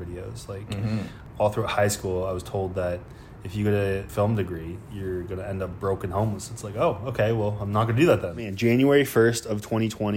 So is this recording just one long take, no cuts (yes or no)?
no